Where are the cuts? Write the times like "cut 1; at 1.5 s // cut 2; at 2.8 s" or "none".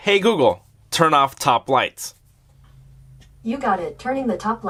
none